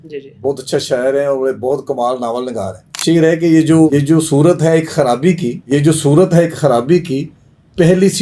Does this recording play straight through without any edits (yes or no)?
no